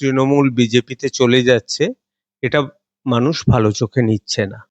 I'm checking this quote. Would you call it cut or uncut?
uncut